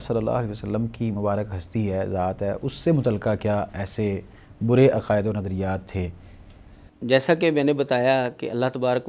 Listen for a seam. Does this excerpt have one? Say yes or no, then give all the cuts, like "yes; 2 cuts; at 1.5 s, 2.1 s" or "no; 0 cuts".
no; 0 cuts